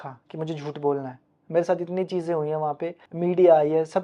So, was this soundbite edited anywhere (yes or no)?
no